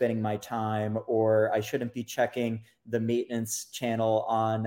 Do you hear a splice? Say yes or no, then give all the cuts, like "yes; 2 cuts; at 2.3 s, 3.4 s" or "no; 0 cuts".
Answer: no; 0 cuts